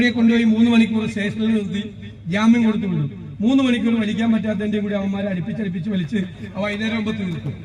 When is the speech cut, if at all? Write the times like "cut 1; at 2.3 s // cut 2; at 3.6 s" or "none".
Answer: none